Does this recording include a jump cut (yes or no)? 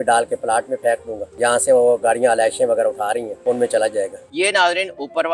yes